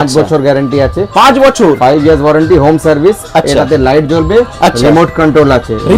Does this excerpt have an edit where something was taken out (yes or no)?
no